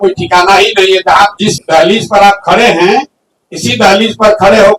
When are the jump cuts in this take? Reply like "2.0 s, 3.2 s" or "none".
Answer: 1.6 s